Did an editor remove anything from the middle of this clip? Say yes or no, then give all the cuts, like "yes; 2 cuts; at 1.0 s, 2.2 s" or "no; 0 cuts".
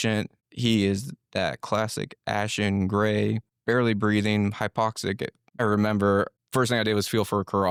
no; 0 cuts